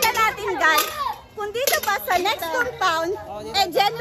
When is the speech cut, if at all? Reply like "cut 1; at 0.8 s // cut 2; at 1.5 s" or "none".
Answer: none